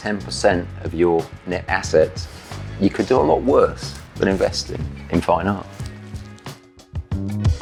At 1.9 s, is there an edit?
no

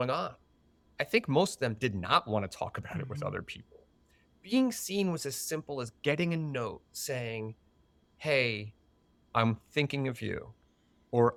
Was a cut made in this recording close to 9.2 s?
no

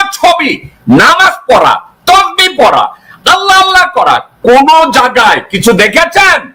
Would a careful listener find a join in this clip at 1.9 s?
no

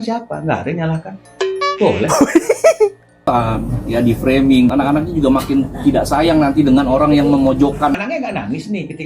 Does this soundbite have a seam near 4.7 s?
yes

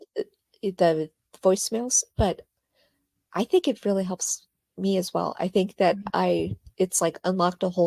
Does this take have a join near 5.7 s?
no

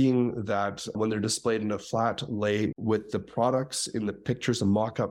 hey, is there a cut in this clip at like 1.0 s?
yes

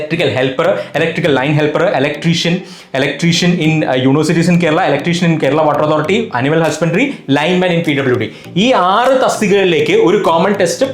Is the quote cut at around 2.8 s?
no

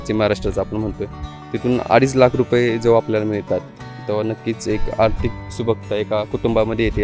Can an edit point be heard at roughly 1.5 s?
no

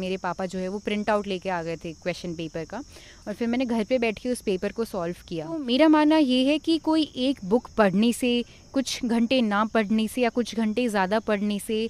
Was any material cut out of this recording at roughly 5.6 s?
yes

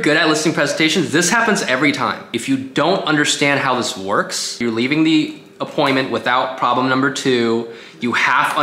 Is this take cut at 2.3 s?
yes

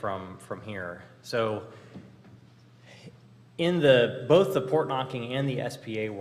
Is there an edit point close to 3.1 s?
yes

